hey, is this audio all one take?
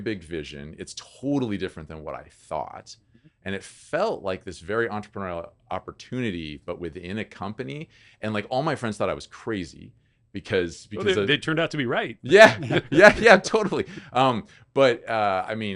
yes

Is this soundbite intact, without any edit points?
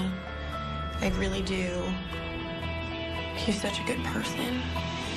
yes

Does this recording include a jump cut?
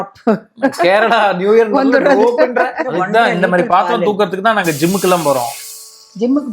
yes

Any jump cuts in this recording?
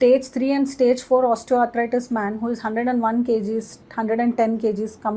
no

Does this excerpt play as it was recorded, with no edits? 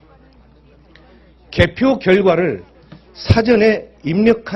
no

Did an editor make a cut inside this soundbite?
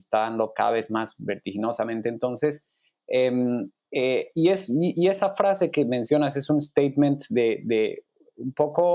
no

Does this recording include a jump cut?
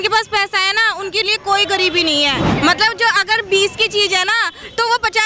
yes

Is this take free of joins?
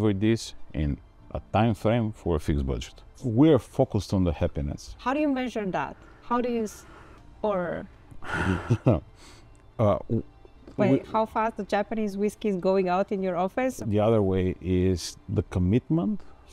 no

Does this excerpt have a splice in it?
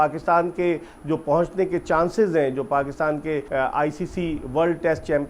yes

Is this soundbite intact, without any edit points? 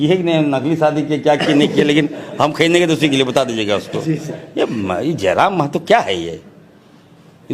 yes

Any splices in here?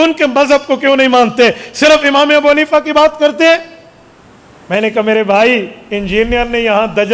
no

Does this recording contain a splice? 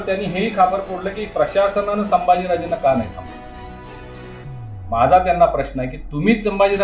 no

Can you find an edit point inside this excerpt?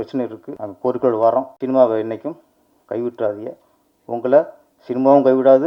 no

